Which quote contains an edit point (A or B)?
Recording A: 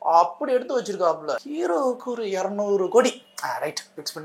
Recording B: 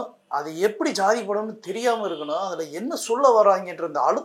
A